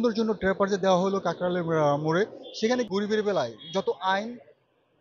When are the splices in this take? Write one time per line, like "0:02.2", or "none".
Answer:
0:02.9

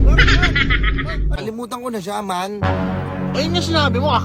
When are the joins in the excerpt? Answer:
0:01.4

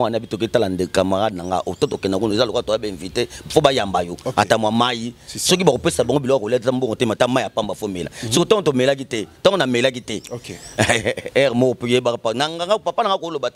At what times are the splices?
none

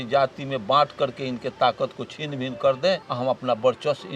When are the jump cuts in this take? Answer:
0:03.1

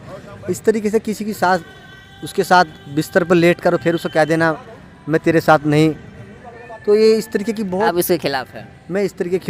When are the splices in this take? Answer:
none

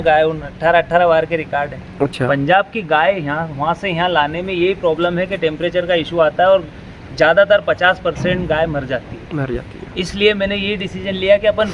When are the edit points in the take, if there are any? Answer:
0:02.1

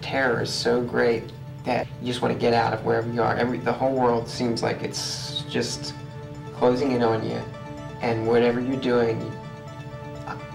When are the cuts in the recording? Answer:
0:01.9

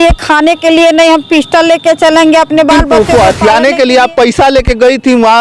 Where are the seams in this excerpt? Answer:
0:02.8

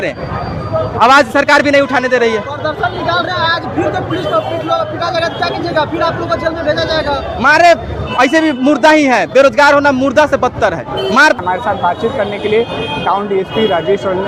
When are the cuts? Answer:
none

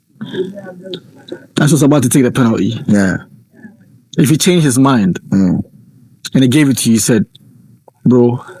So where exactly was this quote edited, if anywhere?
none

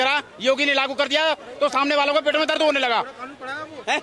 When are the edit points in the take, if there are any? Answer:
none

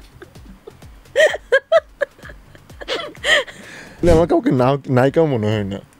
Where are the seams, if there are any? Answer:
0:04.0

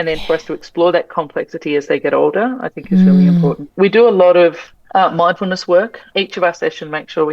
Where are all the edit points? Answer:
0:03.7
0:06.1

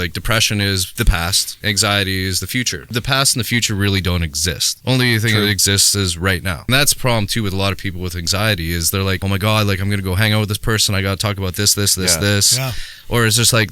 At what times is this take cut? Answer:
0:01.3
0:02.8
0:04.7
0:06.7
0:09.2

